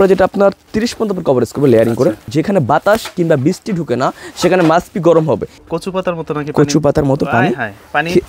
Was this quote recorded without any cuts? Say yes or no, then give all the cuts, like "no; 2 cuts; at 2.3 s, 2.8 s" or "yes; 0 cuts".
no; 2 cuts; at 2.3 s, 5.5 s